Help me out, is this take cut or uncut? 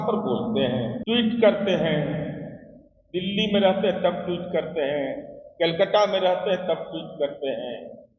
cut